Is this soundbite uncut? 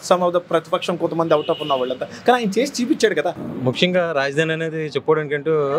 no; 1 cut; at 3.4 s

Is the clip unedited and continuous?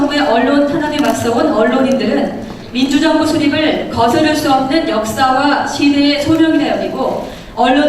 yes; 0 cuts

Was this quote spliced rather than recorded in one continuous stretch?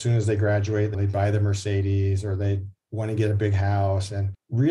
yes; 1 cut; at 0.9 s

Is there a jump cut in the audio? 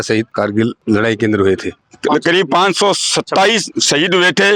yes; 1 cut; at 1.8 s

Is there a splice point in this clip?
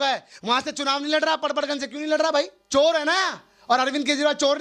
yes; 1 cut; at 2.6 s

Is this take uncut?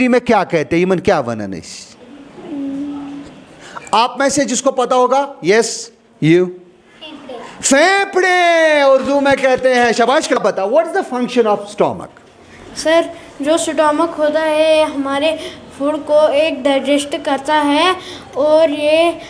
no; 1 cut; at 10.4 s

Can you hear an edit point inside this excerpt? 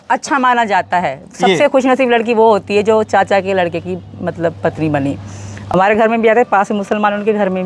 yes; 1 cut; at 5.7 s

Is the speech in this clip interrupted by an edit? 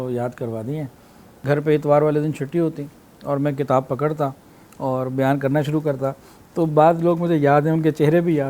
yes; 1 cut; at 1.4 s

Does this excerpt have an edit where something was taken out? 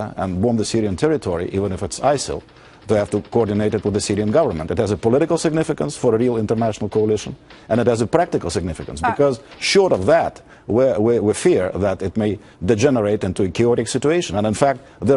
no; 0 cuts

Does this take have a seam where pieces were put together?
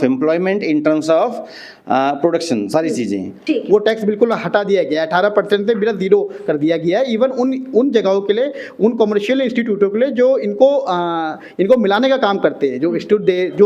yes; 1 cut; at 3.4 s

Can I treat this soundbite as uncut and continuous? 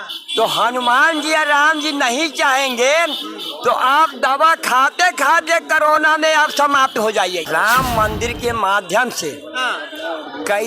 no; 1 cut; at 7.5 s

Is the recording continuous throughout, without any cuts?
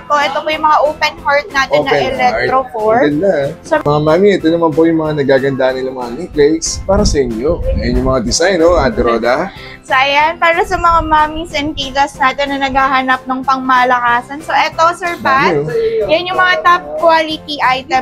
no; 1 cut; at 3.8 s

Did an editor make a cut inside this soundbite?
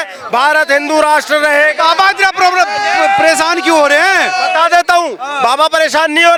no; 0 cuts

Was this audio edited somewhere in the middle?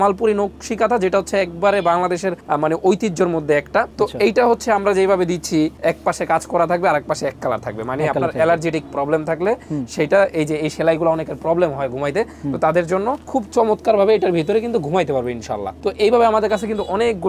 no; 0 cuts

